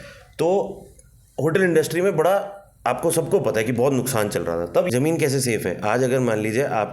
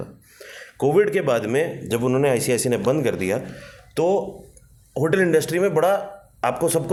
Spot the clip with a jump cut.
first; 1 cut; at 4.9 s

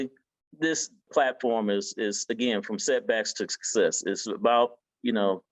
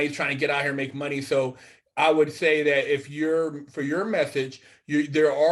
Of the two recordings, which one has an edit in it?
first; 1 cut; at 1.1 s

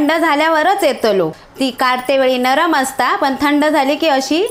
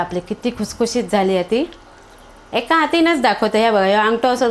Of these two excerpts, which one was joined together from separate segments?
first; 1 cut; at 1.4 s

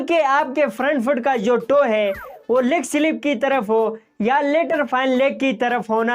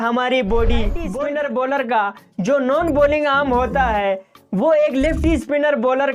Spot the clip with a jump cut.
second; 1 cut; at 1.0 s

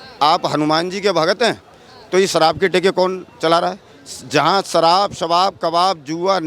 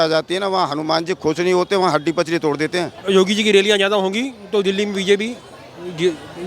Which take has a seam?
second; 1 cut; at 2.9 s

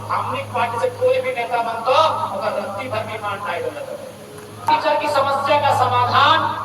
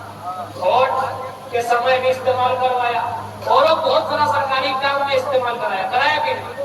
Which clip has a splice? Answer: first; 1 cut; at 4.7 s

